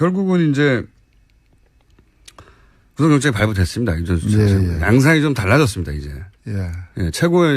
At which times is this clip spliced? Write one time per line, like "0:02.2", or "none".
0:05.7